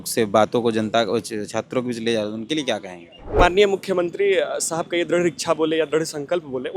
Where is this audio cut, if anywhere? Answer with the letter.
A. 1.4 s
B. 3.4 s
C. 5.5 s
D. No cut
B